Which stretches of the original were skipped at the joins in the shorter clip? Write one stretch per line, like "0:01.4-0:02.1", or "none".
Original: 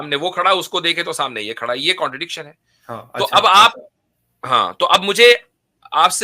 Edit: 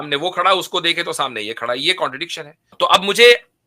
0:02.7-0:04.7

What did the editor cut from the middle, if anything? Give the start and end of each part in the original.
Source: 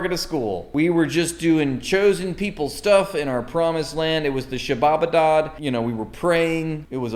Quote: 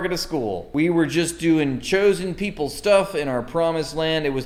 none

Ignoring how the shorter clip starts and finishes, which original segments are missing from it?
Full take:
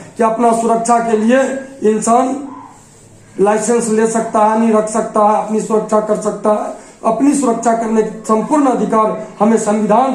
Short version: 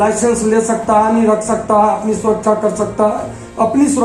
none

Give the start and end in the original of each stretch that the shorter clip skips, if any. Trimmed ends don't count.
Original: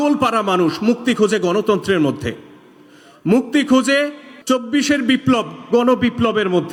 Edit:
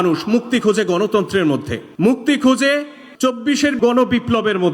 0:02.3-0:03.1
0:05.0-0:05.7

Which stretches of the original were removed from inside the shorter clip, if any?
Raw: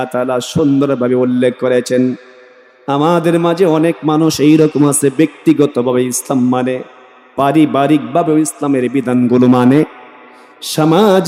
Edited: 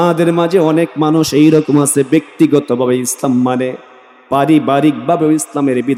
none

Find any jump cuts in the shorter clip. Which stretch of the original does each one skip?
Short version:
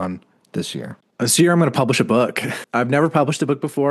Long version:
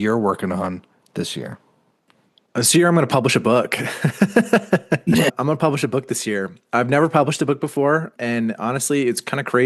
0:01.6-0:02.4
0:03.9-0:06.5

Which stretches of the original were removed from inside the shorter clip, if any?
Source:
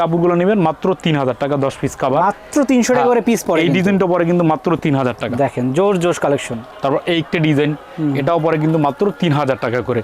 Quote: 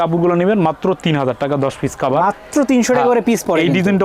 none

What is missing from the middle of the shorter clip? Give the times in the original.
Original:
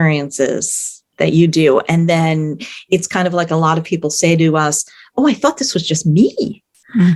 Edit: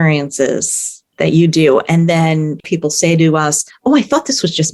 0:02.6-0:03.8
0:04.9-0:05.0

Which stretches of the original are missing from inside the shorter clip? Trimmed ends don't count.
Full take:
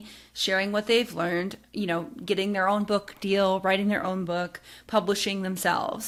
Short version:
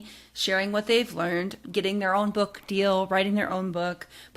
0:01.6-0:02.1

